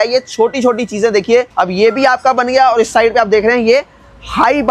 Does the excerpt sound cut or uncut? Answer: cut